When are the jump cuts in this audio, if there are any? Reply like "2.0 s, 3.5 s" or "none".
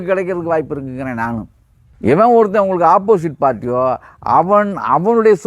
none

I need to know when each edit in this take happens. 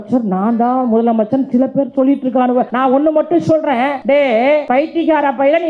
2.7 s, 4.0 s, 4.6 s

